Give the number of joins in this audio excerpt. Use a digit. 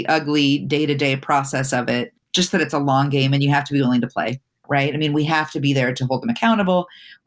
2